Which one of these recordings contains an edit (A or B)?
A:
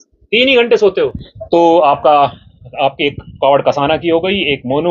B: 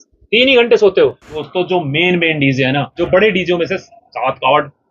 B